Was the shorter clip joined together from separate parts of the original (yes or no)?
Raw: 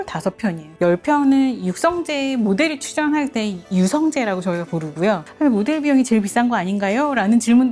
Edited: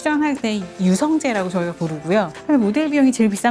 no